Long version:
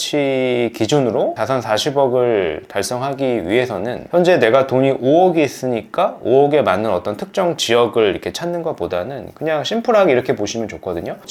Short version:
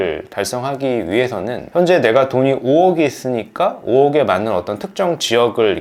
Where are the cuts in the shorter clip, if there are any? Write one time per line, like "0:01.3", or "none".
none